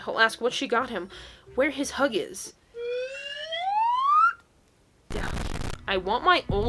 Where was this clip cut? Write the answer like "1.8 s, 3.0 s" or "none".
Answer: 5.6 s

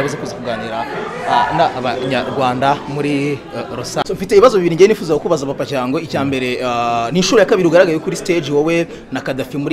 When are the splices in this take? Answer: 4.0 s

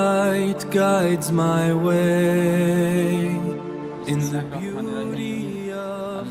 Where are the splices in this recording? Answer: none

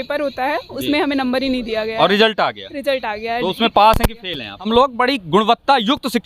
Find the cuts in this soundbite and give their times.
4.7 s

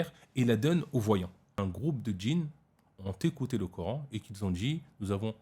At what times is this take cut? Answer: 1.6 s

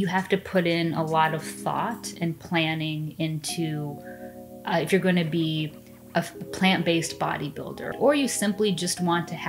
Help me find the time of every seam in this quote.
7.9 s

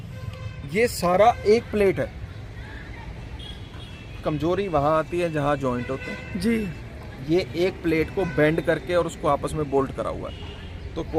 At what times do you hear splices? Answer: none

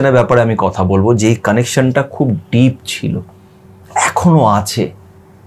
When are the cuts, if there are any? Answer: none

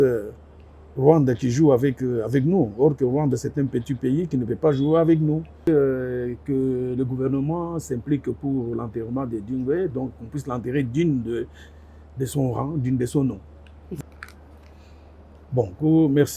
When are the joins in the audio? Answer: 5.7 s, 13.9 s

